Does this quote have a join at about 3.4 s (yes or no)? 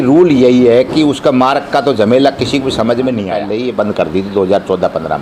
yes